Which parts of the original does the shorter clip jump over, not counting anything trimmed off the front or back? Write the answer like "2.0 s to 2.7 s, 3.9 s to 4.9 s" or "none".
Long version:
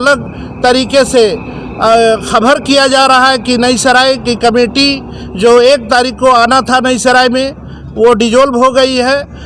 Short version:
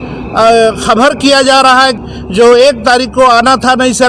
3.4 s to 5.0 s